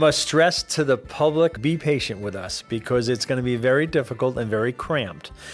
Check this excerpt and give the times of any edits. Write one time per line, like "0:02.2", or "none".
0:01.6